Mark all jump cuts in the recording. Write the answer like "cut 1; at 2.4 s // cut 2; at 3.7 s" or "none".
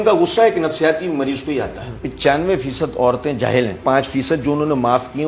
cut 1; at 2.1 s // cut 2; at 3.8 s